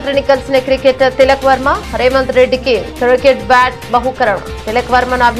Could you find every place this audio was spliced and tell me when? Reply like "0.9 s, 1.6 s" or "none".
none